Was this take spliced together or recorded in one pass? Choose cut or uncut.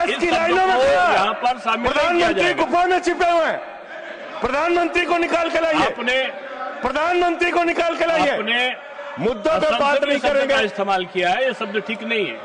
uncut